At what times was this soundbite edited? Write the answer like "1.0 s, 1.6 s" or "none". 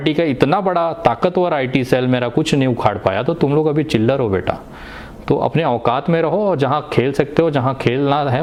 none